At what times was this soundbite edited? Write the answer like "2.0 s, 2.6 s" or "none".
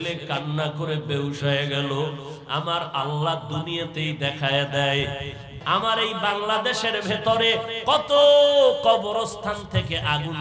5.6 s